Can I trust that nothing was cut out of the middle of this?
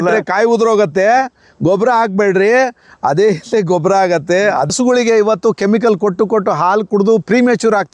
no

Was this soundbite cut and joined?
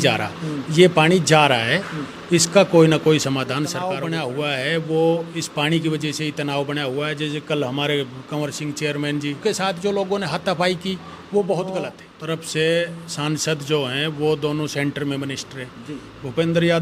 yes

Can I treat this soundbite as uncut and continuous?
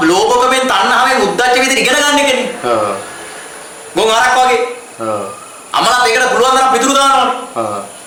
yes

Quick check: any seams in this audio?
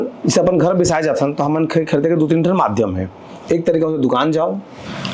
no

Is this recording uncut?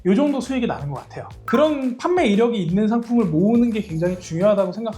no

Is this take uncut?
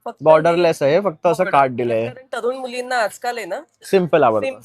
yes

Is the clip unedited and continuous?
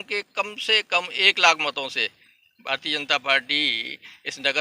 yes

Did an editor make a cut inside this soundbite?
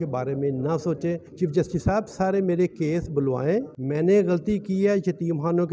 yes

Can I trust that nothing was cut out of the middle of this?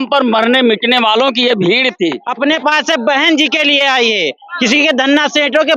no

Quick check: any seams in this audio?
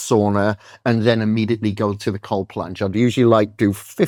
no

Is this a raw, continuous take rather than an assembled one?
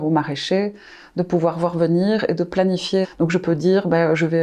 no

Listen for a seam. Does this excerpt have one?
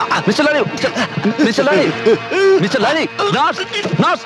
no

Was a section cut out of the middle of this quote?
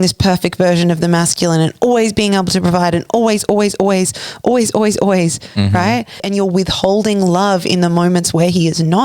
yes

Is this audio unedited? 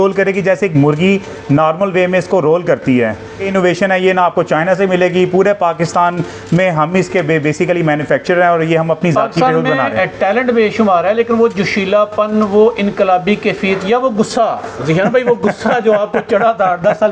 no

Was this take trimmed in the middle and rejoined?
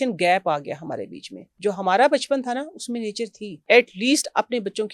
yes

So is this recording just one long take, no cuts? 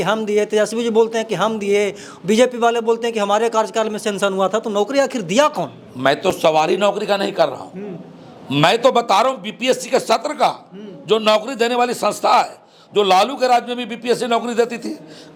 yes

